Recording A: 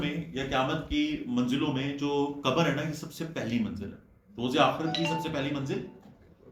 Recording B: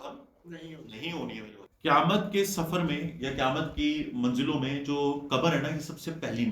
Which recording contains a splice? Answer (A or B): B